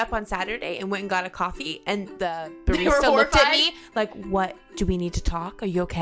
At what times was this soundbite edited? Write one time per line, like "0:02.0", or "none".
0:02.1